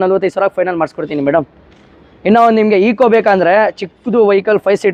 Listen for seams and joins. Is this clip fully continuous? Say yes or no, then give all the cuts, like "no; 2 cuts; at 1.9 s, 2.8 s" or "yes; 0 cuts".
yes; 0 cuts